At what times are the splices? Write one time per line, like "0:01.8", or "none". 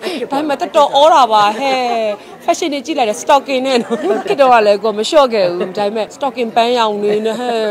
0:04.2
0:06.2